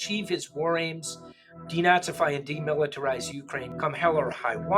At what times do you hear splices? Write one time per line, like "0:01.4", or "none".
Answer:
0:03.7